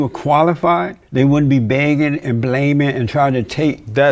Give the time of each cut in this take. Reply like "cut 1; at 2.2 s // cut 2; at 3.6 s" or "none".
cut 1; at 1.0 s